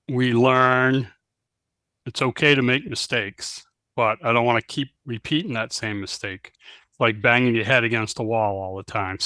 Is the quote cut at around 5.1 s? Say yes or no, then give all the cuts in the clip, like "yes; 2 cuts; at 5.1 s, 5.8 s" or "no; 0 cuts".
no; 0 cuts